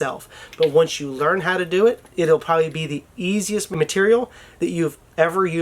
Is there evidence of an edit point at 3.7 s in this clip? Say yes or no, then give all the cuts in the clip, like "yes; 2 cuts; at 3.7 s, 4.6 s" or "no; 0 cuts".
yes; 1 cut; at 3.7 s